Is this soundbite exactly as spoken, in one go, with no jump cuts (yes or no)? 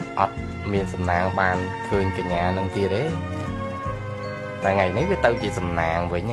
yes